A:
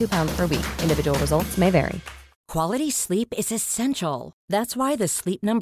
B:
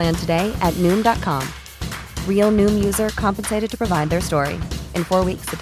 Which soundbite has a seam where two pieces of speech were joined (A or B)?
A